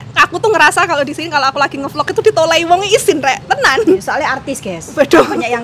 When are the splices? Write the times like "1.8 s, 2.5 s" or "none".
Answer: none